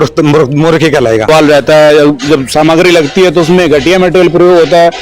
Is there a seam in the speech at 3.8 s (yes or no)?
no